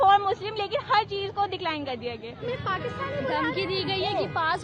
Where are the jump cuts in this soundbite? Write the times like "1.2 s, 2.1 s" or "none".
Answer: 2.4 s